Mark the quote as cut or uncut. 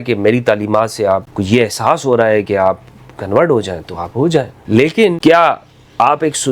cut